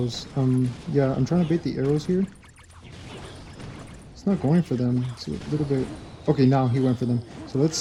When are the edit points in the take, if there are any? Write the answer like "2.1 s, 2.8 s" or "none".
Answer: none